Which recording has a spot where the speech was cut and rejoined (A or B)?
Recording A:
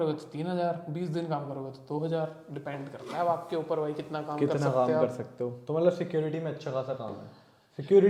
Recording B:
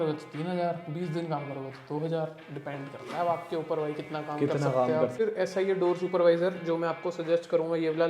B